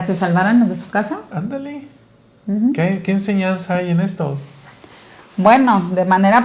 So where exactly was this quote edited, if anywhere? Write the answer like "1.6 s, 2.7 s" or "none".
none